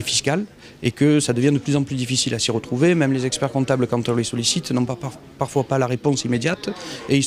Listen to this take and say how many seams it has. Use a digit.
1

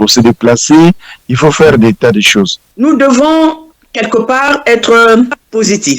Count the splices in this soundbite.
1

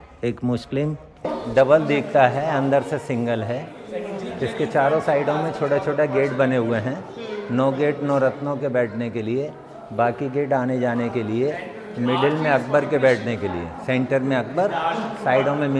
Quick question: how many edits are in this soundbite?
1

